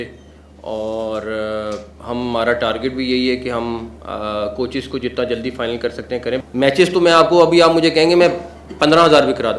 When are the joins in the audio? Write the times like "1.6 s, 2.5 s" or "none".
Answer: 6.4 s